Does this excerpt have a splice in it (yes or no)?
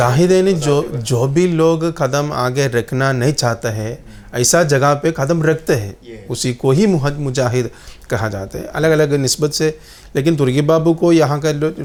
no